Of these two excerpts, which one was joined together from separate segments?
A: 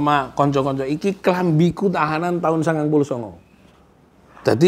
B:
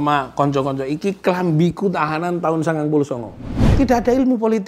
B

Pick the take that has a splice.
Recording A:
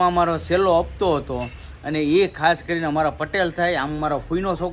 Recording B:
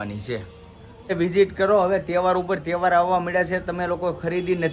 B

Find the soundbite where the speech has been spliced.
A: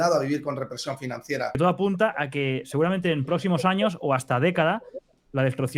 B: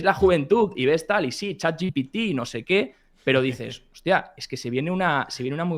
A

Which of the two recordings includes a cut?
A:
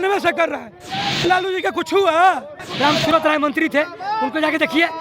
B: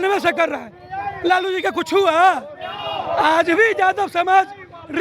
A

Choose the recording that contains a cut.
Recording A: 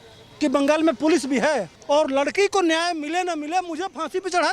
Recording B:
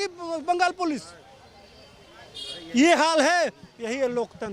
A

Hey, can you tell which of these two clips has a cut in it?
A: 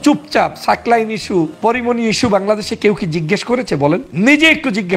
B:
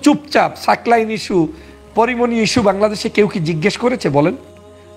A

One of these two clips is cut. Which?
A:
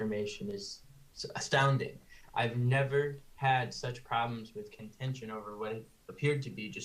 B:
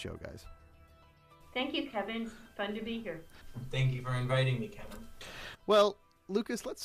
A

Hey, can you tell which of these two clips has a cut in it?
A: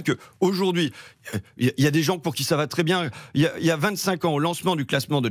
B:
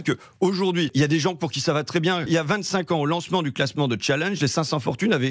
B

